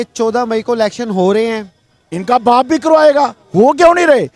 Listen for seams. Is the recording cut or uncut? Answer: uncut